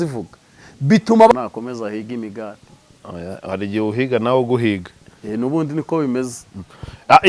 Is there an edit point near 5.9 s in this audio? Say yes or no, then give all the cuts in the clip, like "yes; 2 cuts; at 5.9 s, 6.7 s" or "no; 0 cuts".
no; 1 cut; at 1.3 s